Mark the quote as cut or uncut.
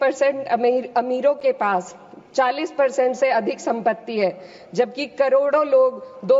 uncut